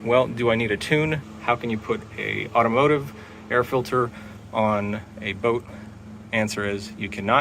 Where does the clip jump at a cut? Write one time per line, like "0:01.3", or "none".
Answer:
0:01.3